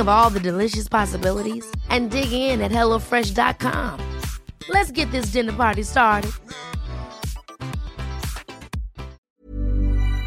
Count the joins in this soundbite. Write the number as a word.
one